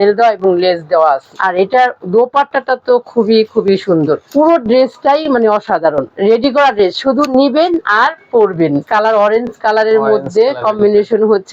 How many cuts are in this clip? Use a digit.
4